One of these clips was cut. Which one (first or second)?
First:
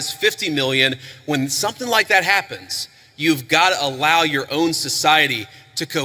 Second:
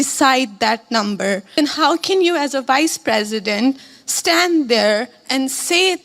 second